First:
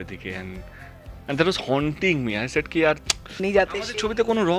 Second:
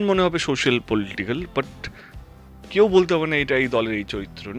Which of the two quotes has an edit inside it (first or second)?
first